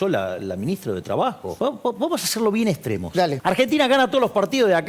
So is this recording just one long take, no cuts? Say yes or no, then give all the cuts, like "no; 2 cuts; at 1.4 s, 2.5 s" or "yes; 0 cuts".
no; 2 cuts; at 1.5 s, 3.4 s